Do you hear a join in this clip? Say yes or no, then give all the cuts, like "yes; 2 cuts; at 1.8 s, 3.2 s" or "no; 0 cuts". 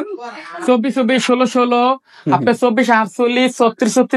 no; 0 cuts